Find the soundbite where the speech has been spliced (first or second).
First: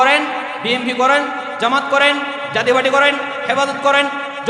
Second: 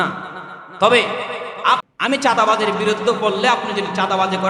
second